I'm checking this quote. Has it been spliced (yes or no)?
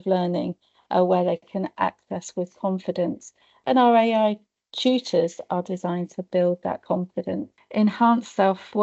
yes